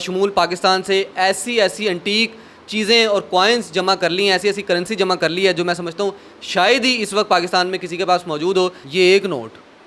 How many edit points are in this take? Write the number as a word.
one